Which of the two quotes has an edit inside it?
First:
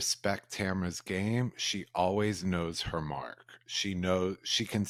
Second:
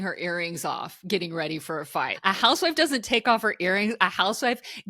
second; 1 cut; at 2.1 s

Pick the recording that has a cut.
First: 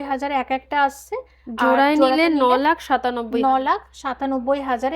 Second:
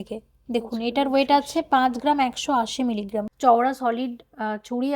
second; 1 cut; at 3.3 s

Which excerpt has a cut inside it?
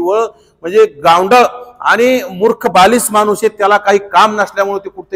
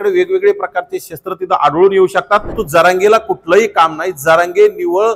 second; 1 cut; at 2.6 s

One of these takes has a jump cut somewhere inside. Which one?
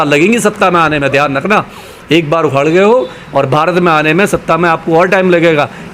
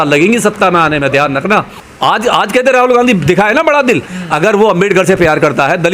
second; 1 cut; at 1.8 s

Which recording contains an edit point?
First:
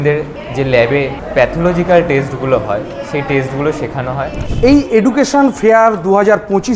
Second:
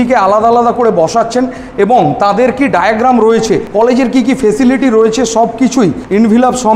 first; 1 cut; at 4.4 s

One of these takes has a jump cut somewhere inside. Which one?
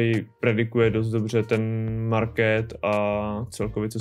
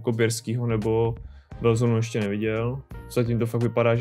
second; 1 cut; at 2.9 s

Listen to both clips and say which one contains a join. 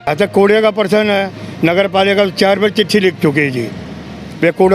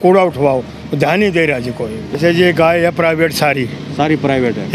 second; 1 cut; at 2.1 s

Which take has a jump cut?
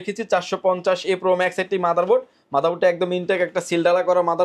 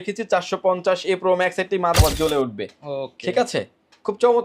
second; 1 cut; at 2.0 s

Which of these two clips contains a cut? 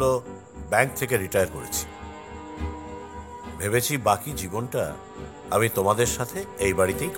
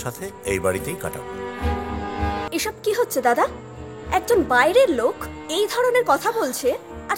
second; 1 cut; at 2.5 s

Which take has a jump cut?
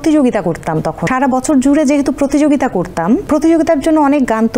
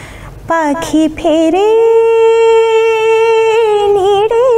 first; 2 cuts; at 1.0 s, 3.2 s

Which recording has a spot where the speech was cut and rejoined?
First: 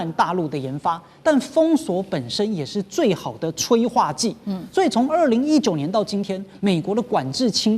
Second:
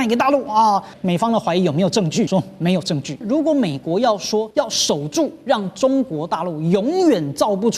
second; 4 cuts; at 1.0 s, 2.3 s, 3.2 s, 4.5 s

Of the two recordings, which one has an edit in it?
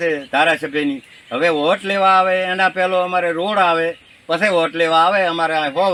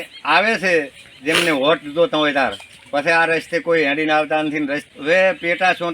second; 1 cut; at 4.8 s

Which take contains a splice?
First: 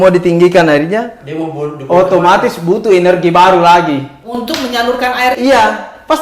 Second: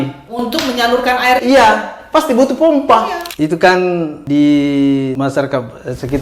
second; 3 cuts; at 3.2 s, 4.2 s, 5.1 s

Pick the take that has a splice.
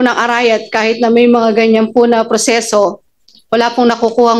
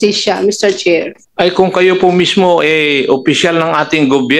second; 1 cut; at 1.2 s

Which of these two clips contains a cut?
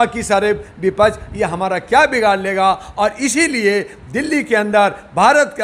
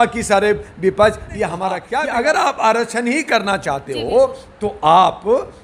second; 1 cut; at 1.8 s

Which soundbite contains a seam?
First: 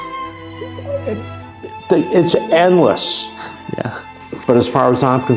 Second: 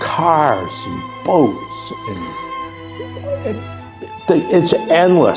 first; 1 cut; at 3.9 s

